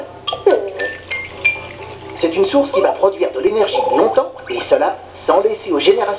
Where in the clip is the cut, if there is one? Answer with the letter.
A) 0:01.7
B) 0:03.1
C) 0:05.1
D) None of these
D